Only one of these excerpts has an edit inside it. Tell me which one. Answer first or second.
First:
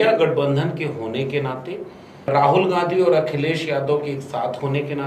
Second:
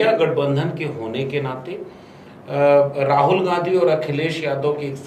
first